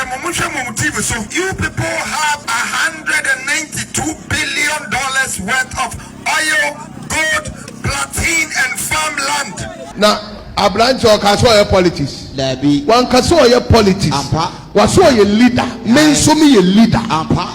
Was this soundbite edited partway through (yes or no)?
yes